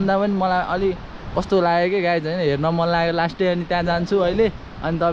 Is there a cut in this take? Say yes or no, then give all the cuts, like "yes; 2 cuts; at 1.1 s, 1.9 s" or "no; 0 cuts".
no; 0 cuts